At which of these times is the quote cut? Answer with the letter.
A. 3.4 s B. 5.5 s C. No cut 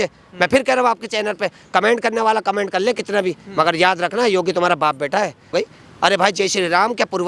B